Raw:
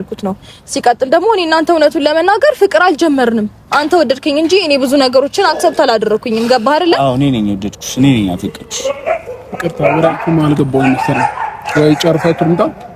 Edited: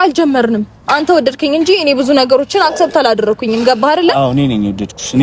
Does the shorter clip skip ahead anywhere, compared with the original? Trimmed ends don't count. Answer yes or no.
no